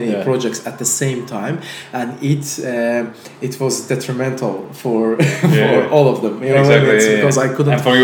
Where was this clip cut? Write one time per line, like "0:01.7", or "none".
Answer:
none